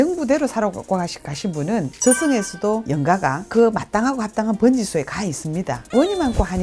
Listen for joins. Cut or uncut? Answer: cut